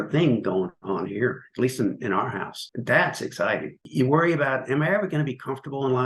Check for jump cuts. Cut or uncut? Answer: cut